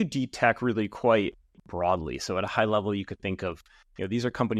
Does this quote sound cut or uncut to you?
uncut